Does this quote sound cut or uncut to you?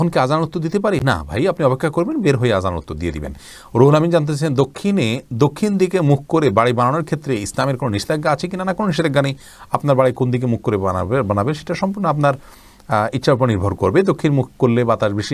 uncut